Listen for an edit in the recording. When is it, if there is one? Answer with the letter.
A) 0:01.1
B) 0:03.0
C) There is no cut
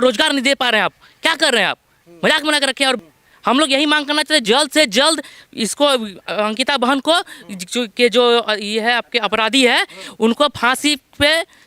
B